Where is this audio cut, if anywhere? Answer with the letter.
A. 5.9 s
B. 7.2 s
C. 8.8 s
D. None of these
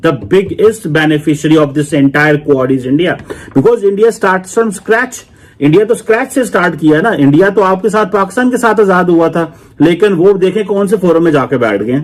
D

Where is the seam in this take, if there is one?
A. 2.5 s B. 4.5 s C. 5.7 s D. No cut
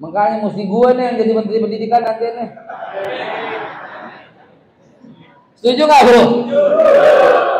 D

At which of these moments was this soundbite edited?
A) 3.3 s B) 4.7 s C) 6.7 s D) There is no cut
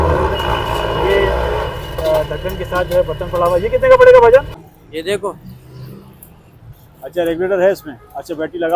B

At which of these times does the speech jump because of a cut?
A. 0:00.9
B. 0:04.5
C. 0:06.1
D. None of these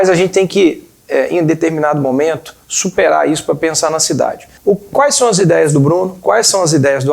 B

